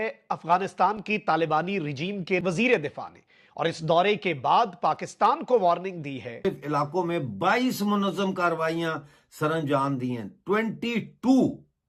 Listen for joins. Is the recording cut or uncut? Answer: uncut